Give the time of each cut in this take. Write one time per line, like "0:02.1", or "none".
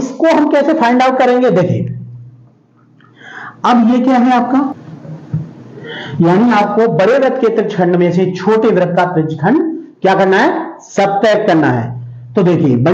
0:04.9